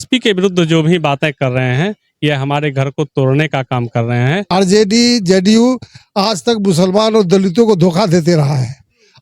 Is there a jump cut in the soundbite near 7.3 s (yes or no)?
no